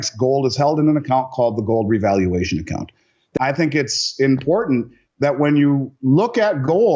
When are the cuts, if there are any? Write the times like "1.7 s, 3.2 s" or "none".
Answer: 3.4 s